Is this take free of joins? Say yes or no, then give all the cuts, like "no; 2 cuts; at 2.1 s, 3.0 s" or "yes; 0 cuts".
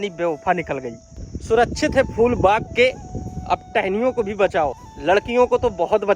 no; 1 cut; at 4.9 s